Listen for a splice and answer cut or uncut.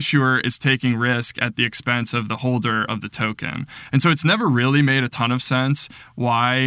uncut